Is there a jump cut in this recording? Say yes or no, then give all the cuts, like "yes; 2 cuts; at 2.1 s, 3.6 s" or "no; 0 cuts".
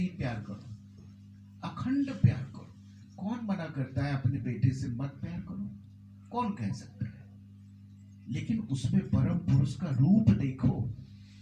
no; 0 cuts